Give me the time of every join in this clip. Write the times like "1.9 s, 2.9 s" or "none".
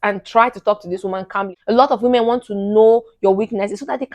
1.5 s